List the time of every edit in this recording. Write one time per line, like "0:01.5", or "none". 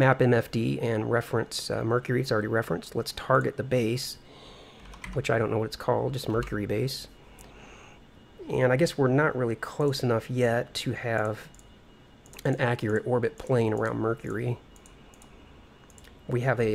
0:06.0